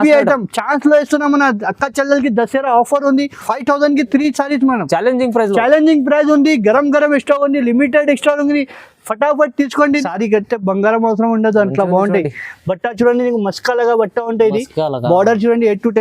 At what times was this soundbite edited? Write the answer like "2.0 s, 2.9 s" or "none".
3.4 s, 10.0 s